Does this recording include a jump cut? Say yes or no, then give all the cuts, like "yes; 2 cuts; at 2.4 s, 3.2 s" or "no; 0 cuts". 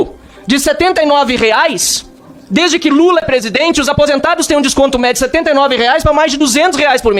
no; 0 cuts